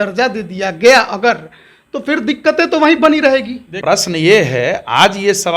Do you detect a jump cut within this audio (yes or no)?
yes